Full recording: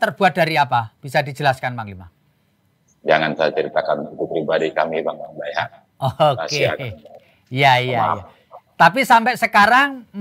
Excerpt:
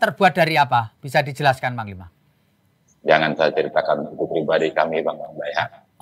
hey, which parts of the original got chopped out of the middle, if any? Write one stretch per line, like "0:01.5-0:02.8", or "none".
none